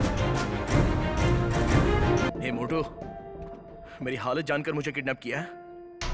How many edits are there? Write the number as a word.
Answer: one